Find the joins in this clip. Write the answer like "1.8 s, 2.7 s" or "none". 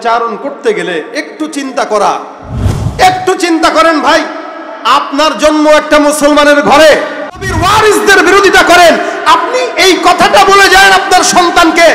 7.5 s